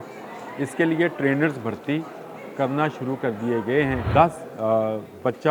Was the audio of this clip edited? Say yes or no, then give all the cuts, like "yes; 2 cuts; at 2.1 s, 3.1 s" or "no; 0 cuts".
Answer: yes; 1 cut; at 4.0 s